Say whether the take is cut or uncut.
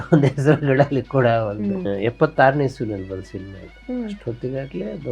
cut